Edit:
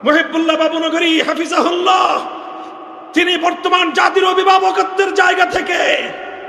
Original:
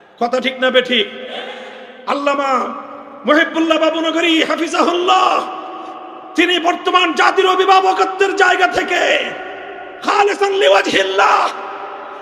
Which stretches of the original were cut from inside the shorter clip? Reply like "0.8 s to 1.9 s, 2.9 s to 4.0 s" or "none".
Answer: none